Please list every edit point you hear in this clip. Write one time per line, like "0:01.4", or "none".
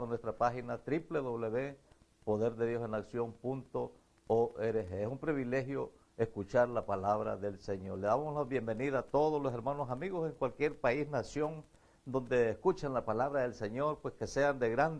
none